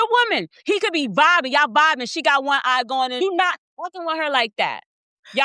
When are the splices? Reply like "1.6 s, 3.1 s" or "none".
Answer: 3.2 s